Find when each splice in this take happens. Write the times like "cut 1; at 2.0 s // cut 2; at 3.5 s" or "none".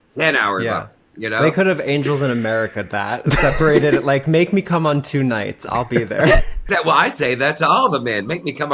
none